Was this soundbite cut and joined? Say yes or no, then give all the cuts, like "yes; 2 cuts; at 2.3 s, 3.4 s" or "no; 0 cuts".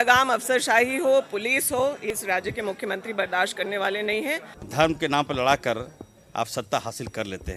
yes; 2 cuts; at 2.1 s, 4.5 s